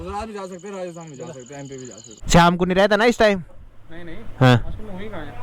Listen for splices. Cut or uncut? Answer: cut